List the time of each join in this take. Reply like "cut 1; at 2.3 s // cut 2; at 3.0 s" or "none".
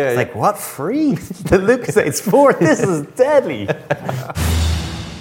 cut 1; at 4.3 s

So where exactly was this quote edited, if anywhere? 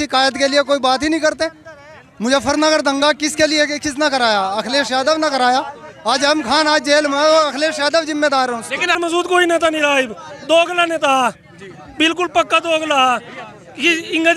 cut 1; at 9.0 s

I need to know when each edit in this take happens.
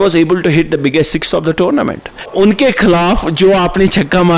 cut 1; at 2.3 s

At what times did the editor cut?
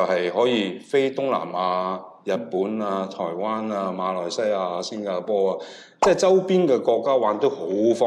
none

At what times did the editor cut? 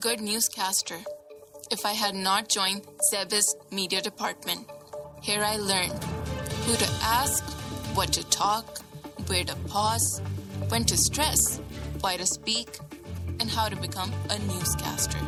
none

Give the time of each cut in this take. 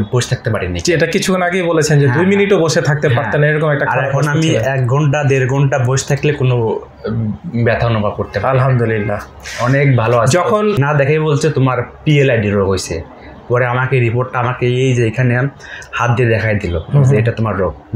cut 1; at 10.8 s

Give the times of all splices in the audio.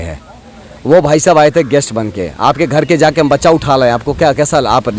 none

